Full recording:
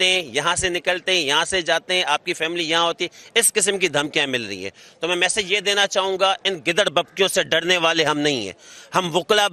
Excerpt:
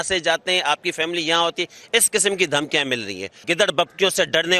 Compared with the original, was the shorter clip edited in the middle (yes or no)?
yes